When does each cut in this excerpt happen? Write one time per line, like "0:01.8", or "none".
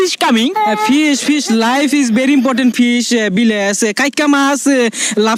none